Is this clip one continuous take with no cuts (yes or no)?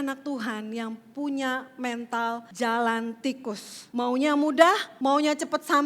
no